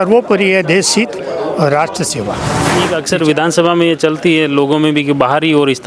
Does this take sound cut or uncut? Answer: cut